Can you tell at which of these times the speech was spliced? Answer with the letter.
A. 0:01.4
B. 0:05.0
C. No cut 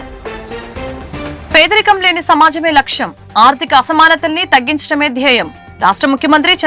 A